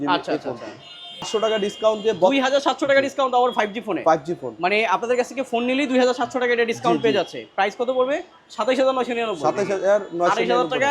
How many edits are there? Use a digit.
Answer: 1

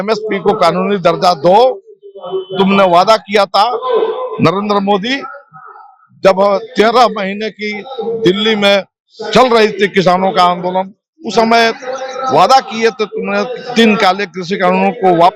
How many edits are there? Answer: 0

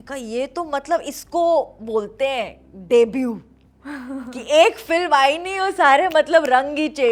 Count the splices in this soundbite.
0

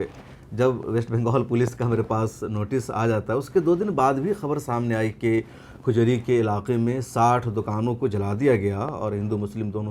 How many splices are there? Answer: 0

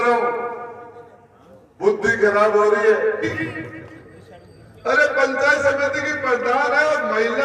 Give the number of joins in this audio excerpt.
1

